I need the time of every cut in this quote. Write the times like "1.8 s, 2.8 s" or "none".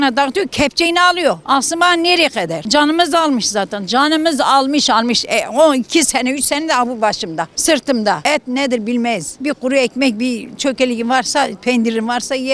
1.4 s, 2.6 s, 7.5 s, 8.2 s, 9.3 s